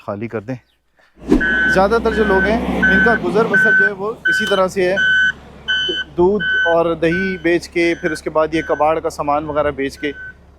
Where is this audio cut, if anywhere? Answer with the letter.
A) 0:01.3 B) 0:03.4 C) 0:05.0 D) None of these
A